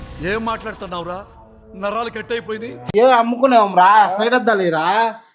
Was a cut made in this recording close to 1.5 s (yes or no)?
no